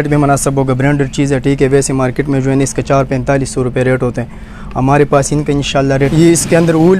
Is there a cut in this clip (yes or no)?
yes